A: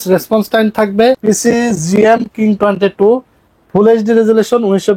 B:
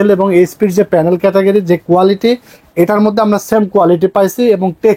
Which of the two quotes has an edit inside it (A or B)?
A